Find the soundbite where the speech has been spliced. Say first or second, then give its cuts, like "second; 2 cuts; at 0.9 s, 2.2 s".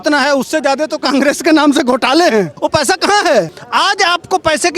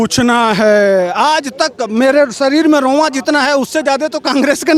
first; 2 cuts; at 2.5 s, 3.6 s